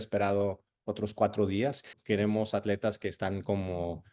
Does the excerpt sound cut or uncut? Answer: cut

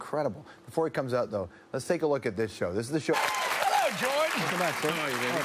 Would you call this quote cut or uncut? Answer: uncut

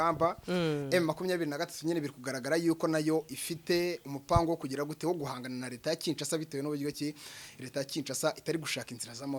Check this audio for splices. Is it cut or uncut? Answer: uncut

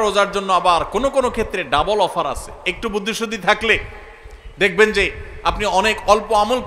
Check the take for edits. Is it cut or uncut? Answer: uncut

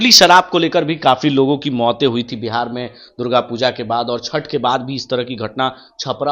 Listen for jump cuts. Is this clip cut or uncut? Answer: uncut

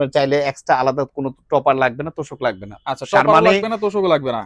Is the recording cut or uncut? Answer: uncut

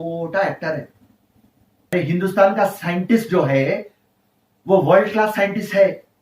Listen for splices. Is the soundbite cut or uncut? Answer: cut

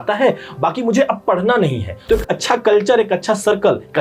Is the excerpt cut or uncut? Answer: cut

